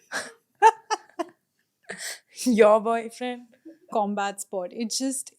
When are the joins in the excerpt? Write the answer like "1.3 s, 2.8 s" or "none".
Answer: 3.9 s